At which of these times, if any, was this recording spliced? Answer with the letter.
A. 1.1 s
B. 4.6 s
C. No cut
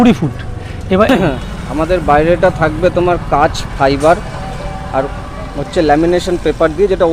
A